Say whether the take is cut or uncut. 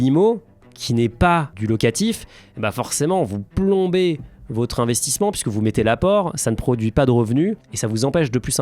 cut